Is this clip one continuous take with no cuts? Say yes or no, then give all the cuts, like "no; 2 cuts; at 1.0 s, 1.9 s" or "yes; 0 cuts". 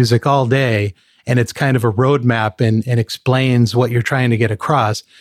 yes; 0 cuts